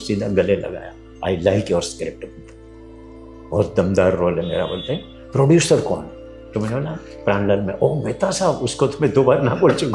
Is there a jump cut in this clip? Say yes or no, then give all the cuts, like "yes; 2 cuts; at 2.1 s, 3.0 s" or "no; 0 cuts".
no; 0 cuts